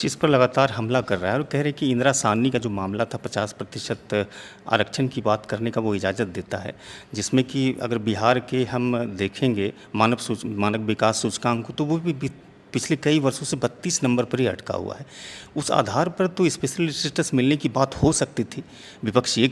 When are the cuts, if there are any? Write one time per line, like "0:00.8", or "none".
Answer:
none